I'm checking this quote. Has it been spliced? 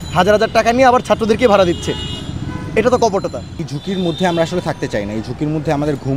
yes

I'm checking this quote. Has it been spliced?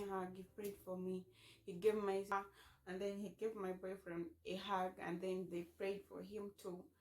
yes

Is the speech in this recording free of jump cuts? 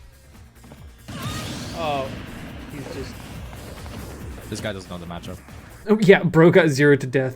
no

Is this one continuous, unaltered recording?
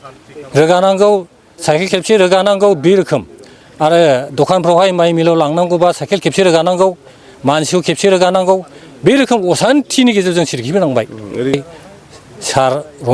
no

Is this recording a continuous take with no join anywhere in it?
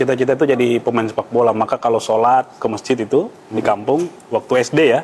yes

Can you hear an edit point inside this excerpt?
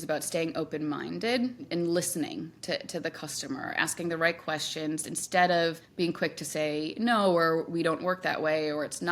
yes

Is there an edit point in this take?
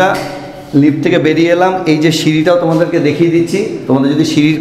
no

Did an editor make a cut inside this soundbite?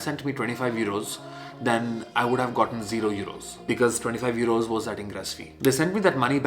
yes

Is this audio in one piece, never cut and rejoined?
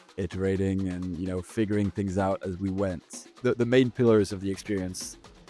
no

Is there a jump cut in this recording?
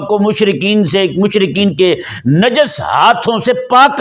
no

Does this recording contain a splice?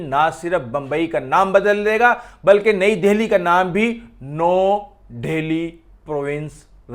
no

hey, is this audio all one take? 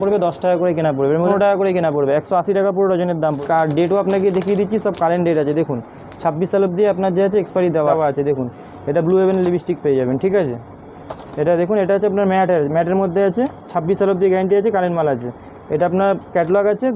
no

